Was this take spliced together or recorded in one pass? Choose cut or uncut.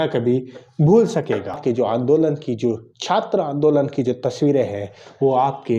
cut